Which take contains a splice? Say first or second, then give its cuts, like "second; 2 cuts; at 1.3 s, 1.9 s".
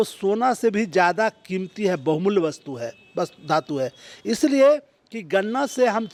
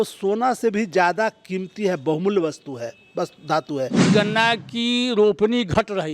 second; 1 cut; at 4.1 s